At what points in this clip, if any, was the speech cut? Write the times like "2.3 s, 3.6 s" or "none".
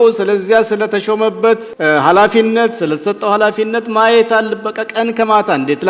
1.7 s